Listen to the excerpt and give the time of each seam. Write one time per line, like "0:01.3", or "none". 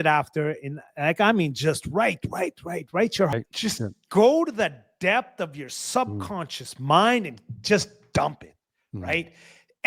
0:03.3